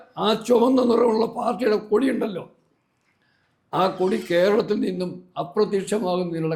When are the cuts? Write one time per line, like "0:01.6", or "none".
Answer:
none